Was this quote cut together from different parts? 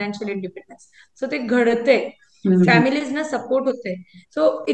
no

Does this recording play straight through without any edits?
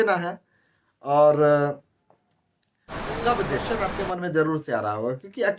no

